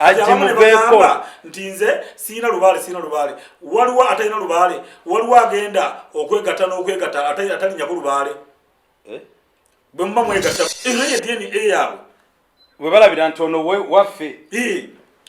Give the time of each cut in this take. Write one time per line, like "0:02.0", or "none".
0:10.7